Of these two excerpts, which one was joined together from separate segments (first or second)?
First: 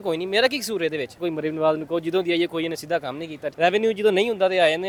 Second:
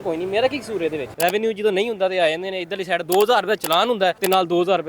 second